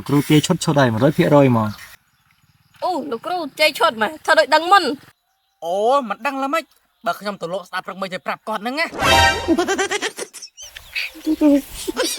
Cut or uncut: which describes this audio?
uncut